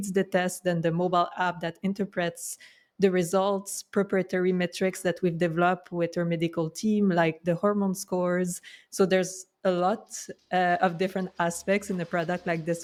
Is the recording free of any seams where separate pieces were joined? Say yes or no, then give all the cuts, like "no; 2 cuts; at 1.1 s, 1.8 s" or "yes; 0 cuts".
yes; 0 cuts